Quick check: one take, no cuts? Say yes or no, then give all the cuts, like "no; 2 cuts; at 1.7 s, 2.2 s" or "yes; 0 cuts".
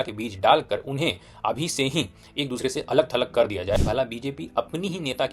no; 1 cut; at 3.8 s